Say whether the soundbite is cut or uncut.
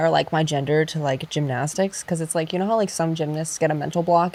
uncut